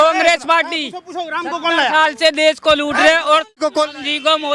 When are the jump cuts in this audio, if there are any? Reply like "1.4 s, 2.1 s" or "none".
3.6 s